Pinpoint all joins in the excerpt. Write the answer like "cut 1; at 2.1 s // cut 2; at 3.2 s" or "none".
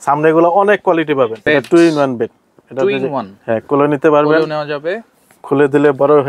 cut 1; at 1.4 s